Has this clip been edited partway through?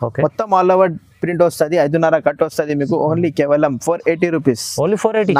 no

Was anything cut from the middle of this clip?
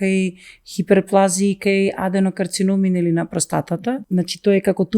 yes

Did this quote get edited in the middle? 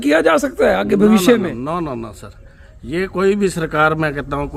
no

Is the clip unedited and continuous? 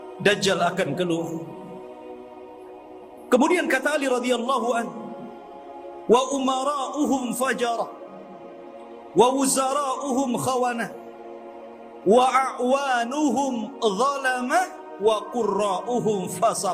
yes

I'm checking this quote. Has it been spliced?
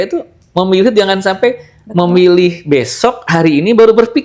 no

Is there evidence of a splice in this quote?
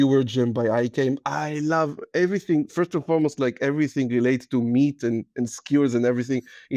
no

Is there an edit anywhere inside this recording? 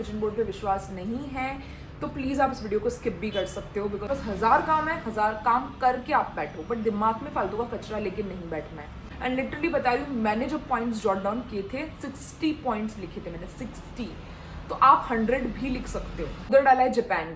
yes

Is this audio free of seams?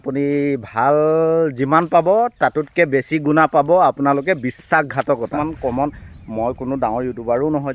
no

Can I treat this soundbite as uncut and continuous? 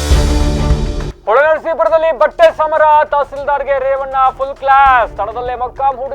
no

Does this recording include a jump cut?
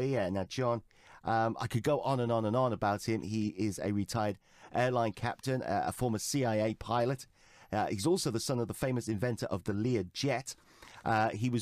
no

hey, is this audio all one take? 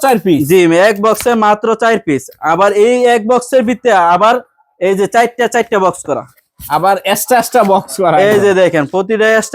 yes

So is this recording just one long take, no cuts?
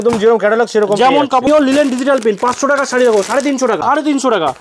no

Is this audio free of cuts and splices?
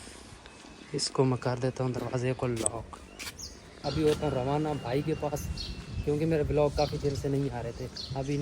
no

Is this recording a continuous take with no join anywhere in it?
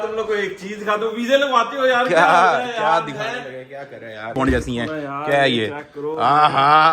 no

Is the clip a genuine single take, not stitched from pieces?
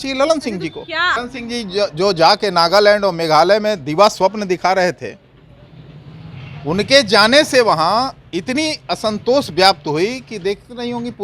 no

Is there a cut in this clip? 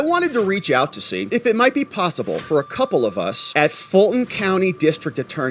no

